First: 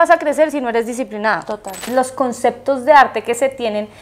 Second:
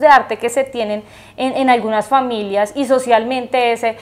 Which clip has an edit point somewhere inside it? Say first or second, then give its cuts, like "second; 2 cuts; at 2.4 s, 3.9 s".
first; 1 cut; at 1.9 s